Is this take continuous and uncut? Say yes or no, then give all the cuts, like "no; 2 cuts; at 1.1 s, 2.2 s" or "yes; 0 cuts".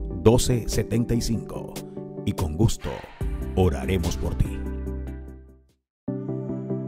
no; 1 cut; at 5.8 s